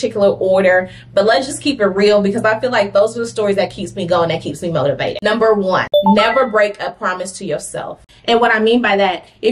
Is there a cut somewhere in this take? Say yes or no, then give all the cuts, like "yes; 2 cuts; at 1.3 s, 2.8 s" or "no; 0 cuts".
no; 0 cuts